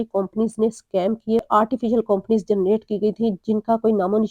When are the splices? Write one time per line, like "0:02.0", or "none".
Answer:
0:01.5